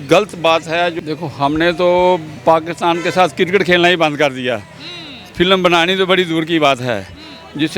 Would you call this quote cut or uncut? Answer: cut